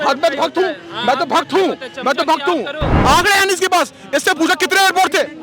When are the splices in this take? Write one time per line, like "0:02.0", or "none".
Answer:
0:02.9